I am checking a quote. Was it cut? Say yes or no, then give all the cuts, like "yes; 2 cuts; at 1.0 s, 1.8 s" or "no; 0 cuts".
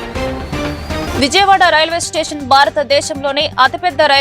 no; 0 cuts